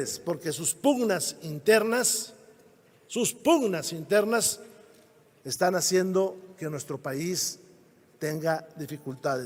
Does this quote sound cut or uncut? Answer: uncut